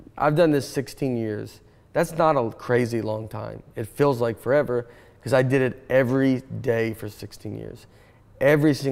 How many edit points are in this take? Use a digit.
0